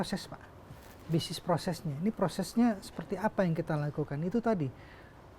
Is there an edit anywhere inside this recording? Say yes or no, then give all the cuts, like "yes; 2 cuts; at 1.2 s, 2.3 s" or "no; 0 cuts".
no; 0 cuts